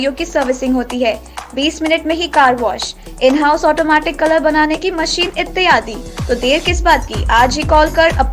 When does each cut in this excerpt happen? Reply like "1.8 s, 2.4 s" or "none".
none